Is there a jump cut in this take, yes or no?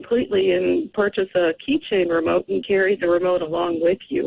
no